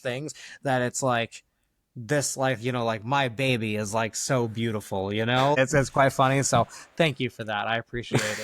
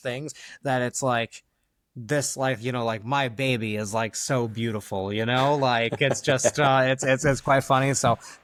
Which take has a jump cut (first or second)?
first